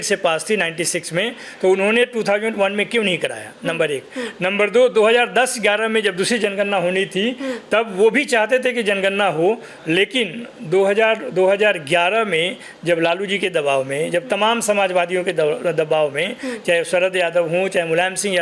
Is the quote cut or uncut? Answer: uncut